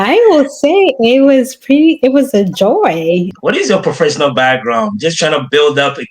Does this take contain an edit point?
yes; 1 cut; at 3.3 s

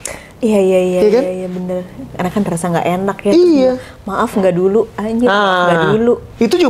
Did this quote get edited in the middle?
no; 0 cuts

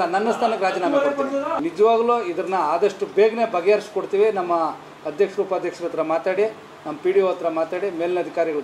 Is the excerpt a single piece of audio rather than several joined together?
no; 1 cut; at 1.6 s

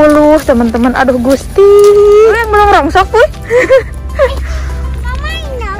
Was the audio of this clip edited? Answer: yes; 1 cut; at 2.4 s

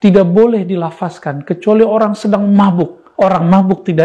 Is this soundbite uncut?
no; 1 cut; at 3.0 s

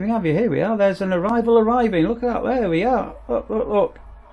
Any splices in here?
no; 0 cuts

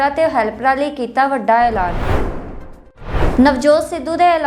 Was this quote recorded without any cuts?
no; 2 cuts; at 1.9 s, 3.2 s

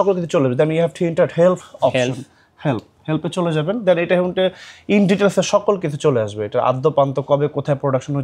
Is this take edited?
no; 0 cuts

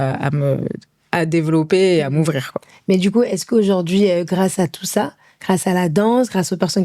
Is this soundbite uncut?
yes; 0 cuts

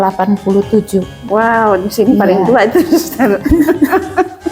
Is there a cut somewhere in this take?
no; 0 cuts

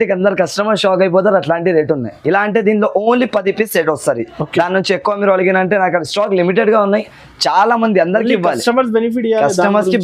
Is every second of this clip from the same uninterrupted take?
yes; 0 cuts

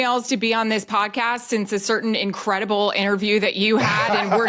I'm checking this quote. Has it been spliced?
no; 0 cuts

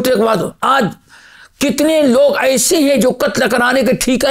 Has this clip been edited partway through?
no; 0 cuts

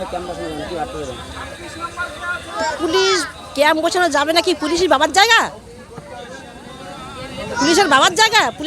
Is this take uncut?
yes; 0 cuts

